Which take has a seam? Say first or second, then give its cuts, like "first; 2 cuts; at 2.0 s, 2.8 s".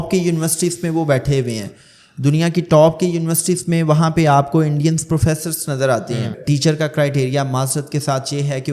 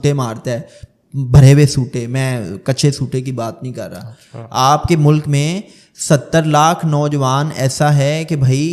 first; 1 cut; at 6.4 s